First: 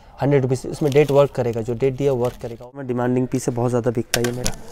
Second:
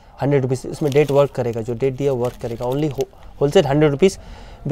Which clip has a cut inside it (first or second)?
first